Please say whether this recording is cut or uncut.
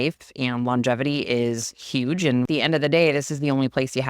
cut